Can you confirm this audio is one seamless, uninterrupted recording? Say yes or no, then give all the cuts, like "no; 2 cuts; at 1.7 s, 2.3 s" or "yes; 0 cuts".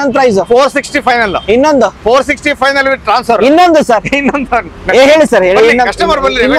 yes; 0 cuts